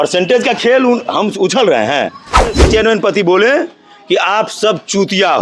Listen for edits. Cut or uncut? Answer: cut